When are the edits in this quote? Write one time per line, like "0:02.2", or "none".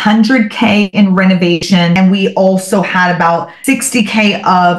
0:01.8
0:03.5